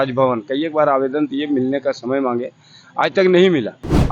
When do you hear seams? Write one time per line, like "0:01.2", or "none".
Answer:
none